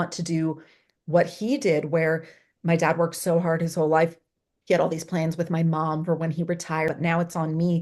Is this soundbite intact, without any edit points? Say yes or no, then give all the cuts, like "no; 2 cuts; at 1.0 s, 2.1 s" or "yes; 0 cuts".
no; 1 cut; at 6.9 s